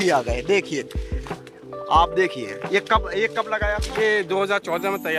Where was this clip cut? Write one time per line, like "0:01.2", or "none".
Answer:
none